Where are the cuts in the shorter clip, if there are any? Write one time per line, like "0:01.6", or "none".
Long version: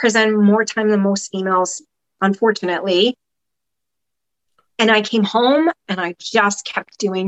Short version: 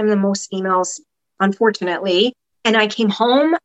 0:02.5